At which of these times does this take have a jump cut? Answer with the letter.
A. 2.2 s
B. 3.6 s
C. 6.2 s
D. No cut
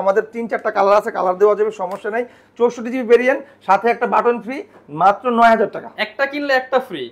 D